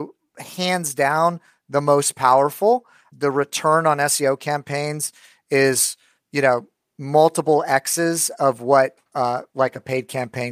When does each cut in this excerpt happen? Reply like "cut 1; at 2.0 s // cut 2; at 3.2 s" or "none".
none